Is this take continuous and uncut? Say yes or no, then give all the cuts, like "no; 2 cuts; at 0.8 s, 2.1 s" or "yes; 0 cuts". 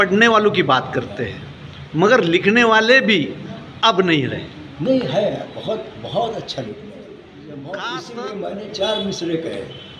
no; 1 cut; at 8.0 s